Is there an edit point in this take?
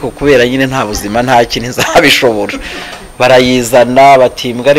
no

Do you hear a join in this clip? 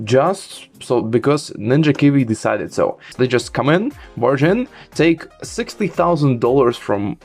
yes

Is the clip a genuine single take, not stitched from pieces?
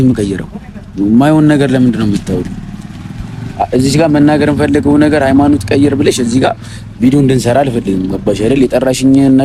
yes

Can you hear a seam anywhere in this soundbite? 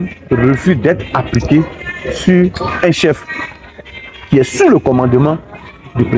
no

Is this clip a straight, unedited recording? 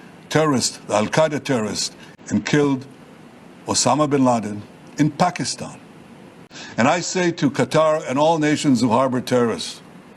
no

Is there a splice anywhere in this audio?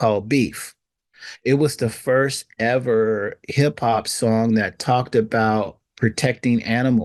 no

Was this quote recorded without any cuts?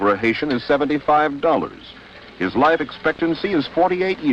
yes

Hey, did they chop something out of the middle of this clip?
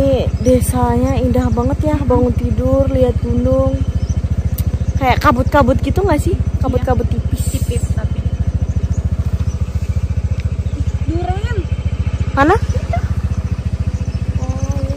no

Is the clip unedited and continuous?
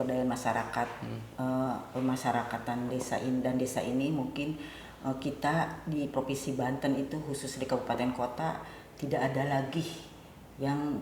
yes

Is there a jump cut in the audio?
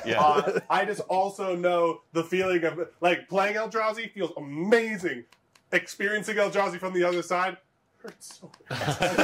no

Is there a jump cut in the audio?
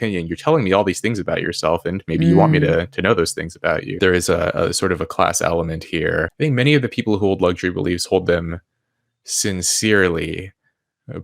yes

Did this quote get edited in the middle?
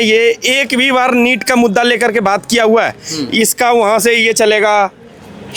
no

